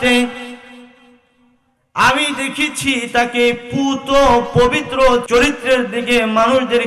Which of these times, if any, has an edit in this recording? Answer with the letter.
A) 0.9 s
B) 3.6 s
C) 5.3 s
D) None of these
C